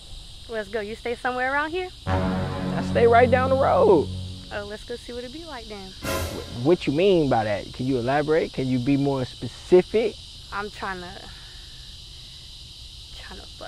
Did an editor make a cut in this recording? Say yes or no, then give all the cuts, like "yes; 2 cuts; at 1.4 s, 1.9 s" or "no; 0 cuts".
yes; 1 cut; at 10.2 s